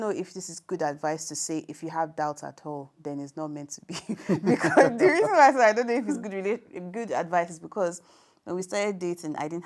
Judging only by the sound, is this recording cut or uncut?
uncut